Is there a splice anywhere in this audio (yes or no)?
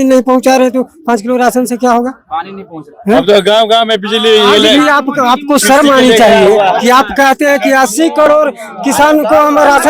no